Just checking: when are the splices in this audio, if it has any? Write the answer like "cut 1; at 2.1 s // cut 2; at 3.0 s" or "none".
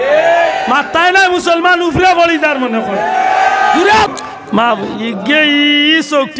cut 1; at 4.1 s